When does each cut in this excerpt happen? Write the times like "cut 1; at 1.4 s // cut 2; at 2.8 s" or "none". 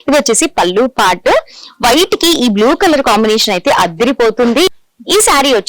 cut 1; at 4.7 s

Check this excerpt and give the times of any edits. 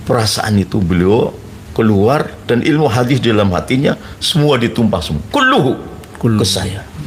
none

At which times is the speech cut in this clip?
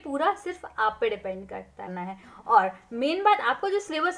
cut 1; at 2.0 s

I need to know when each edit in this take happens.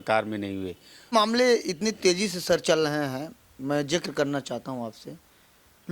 cut 1; at 1.1 s

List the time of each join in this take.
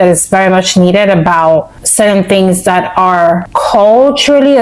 cut 1; at 1.8 s // cut 2; at 3.5 s

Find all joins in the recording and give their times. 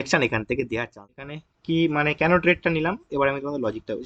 cut 1; at 1.3 s

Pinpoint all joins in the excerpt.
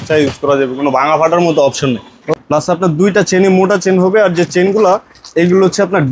cut 1; at 2.3 s

